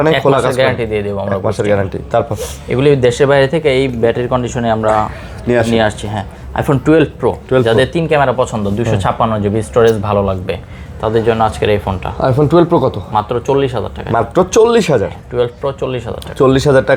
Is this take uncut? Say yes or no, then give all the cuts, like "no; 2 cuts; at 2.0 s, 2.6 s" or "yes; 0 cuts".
yes; 0 cuts